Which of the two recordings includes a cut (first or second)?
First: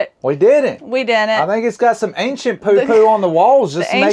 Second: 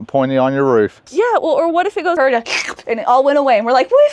second